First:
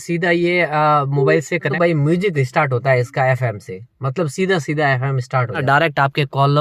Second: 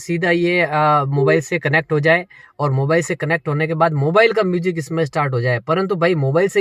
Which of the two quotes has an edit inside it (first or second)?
first